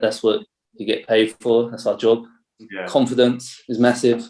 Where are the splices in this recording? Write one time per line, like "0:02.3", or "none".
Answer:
0:02.8